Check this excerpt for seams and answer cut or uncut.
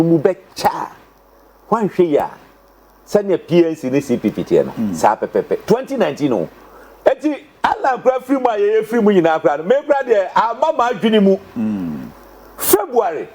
cut